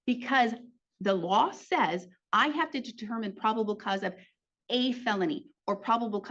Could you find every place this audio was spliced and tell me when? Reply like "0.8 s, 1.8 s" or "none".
none